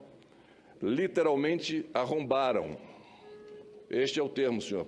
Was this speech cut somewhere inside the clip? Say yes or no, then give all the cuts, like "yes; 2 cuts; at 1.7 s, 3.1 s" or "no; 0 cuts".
yes; 1 cut; at 1.7 s